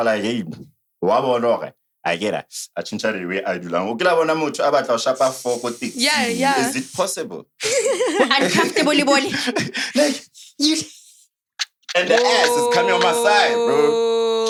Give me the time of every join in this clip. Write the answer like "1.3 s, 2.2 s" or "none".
none

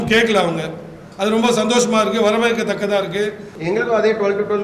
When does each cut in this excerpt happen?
3.5 s

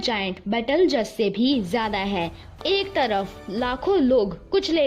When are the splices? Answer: 2.5 s

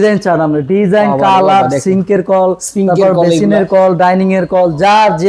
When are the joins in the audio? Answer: none

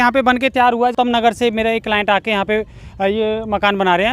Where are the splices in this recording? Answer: 0.9 s

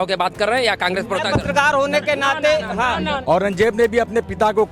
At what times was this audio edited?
3.2 s

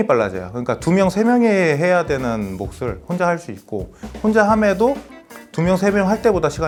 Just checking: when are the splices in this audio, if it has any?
none

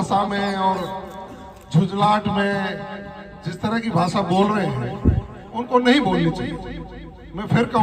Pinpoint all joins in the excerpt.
none

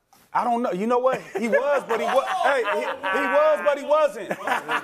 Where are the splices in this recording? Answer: none

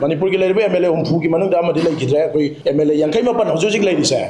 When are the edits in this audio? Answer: 2.6 s

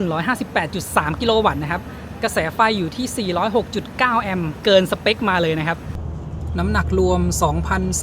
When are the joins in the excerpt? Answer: 4.5 s, 5.9 s

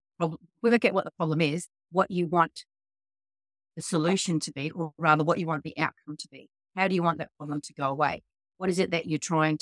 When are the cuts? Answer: none

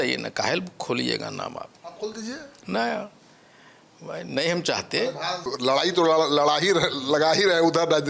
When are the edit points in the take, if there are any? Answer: 5.5 s

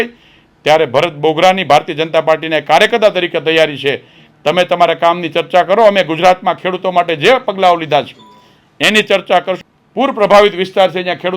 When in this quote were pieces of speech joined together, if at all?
9.6 s

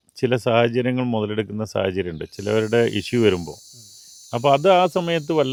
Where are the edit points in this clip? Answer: none

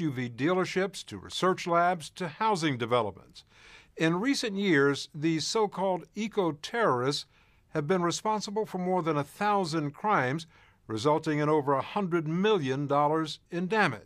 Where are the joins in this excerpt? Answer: 13.0 s

